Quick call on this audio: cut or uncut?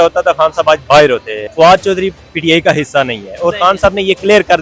cut